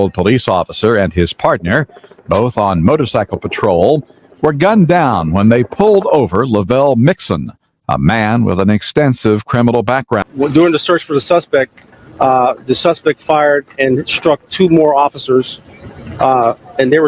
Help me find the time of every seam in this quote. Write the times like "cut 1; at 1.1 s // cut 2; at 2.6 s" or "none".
cut 1; at 10.2 s

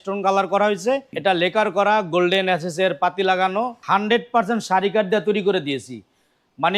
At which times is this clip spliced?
cut 1; at 1.1 s // cut 2; at 3.8 s

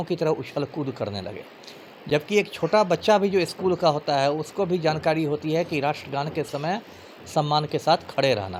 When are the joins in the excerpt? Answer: none

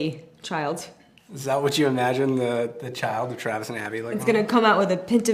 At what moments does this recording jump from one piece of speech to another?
none

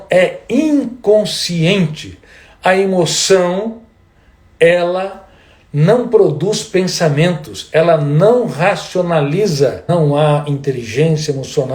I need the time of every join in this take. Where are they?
cut 1; at 9.8 s

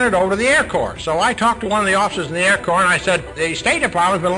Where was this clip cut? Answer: cut 1; at 3.3 s

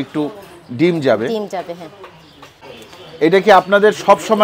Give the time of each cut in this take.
cut 1; at 2.7 s

